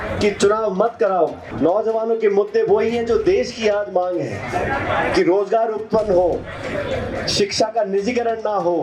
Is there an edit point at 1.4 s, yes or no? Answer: yes